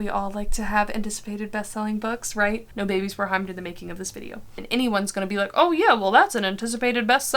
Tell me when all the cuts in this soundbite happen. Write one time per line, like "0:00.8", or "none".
0:02.7
0:04.6